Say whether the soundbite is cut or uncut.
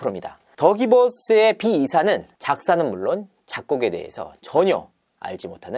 uncut